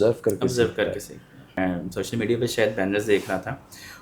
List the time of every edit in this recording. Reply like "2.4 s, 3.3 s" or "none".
1.6 s